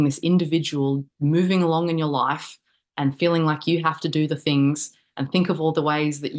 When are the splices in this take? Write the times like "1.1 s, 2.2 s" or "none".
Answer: none